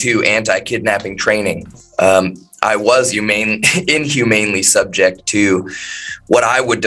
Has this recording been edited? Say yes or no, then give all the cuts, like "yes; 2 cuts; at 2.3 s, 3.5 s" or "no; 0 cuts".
no; 0 cuts